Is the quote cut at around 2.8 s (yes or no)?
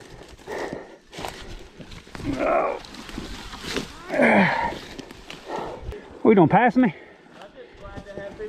no